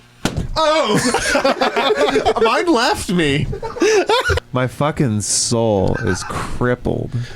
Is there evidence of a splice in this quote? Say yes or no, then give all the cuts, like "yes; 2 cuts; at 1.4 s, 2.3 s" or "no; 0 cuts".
yes; 1 cut; at 4.4 s